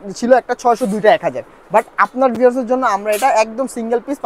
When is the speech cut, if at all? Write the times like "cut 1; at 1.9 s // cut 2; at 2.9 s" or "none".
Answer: none